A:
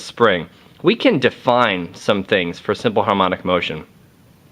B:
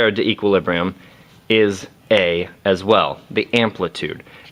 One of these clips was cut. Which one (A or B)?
A